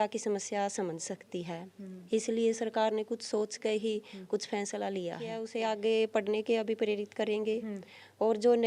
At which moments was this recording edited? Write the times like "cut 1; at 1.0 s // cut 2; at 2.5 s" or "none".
cut 1; at 5.5 s